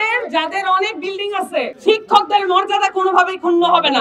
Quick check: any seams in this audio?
yes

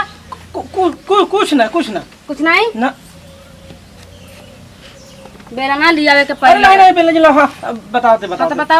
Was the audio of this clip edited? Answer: no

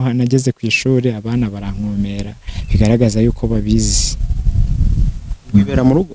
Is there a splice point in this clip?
no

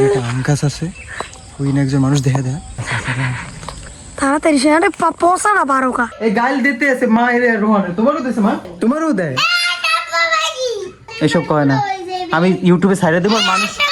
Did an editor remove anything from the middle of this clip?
yes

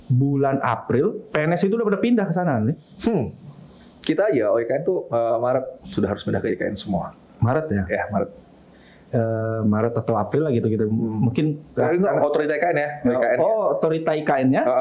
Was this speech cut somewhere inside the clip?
no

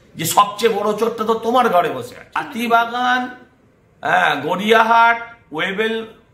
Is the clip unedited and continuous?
no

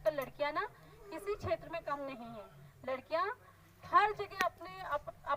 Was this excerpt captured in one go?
yes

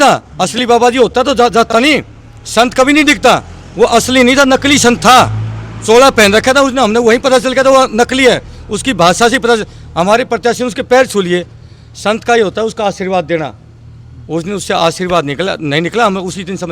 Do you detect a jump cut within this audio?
no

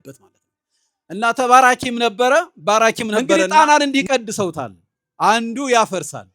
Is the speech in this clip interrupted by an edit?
yes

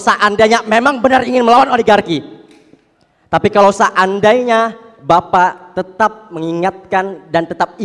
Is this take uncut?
yes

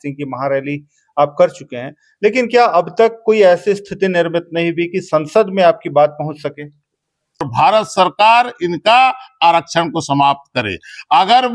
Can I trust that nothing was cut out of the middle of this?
no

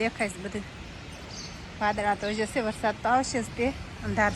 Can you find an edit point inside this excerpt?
no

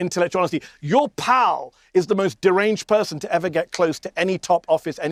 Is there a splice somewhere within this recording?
no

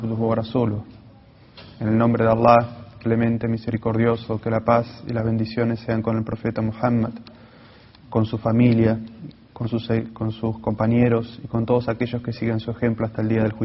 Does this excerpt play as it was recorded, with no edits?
yes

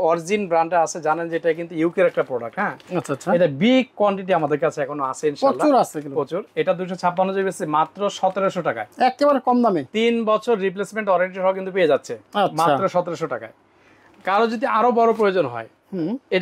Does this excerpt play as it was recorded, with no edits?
yes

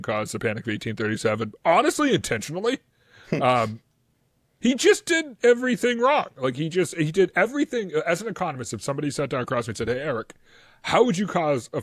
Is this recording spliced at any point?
no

